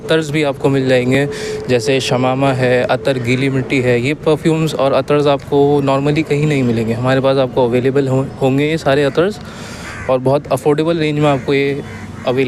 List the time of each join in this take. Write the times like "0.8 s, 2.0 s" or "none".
none